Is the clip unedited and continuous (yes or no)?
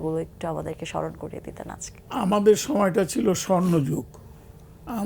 no